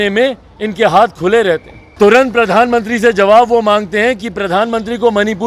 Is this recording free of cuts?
no; 1 cut; at 1.9 s

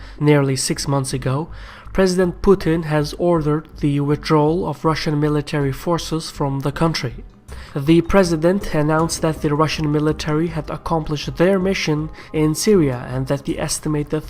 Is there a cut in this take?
yes; 1 cut; at 10.2 s

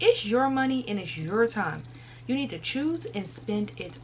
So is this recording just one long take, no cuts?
yes; 0 cuts

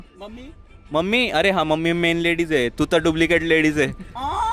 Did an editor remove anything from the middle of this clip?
no; 0 cuts

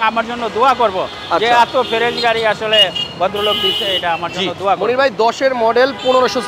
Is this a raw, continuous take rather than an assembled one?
yes; 0 cuts

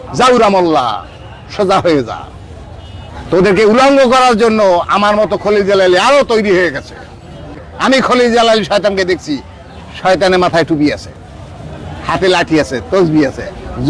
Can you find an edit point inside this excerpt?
yes; 1 cut; at 7.7 s

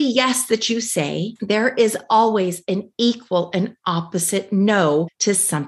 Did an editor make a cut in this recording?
yes; 1 cut; at 1.3 s

